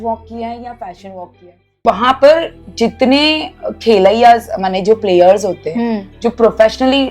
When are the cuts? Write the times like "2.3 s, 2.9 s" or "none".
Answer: 1.8 s